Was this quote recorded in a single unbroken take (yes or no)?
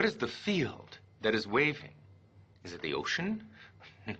yes